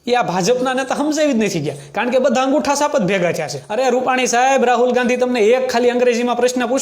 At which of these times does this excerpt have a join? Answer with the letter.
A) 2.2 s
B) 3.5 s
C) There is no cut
B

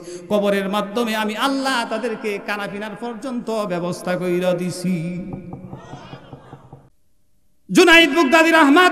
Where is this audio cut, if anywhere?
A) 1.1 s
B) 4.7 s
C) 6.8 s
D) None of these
C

